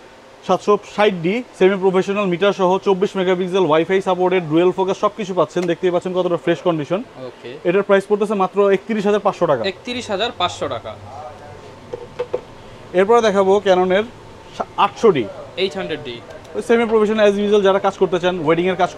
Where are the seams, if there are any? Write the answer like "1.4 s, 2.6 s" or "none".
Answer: none